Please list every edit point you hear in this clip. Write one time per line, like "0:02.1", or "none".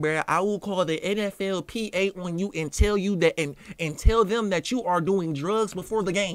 none